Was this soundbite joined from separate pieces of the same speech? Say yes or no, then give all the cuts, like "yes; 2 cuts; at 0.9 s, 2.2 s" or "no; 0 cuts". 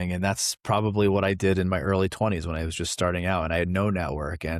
no; 0 cuts